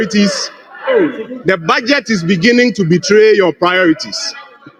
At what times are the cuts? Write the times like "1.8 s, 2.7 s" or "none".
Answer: none